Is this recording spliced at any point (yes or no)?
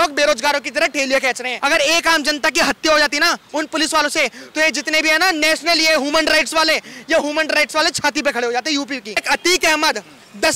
yes